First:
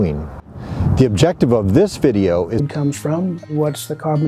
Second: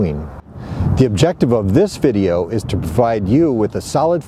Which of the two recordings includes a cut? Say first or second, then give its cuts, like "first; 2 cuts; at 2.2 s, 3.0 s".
second; 1 cut; at 2.6 s